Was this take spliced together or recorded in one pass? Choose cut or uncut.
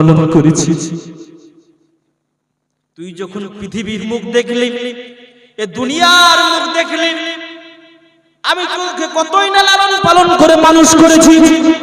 uncut